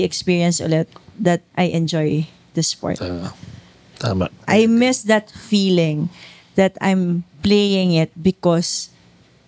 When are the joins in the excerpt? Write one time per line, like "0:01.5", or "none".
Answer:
0:01.5
0:04.4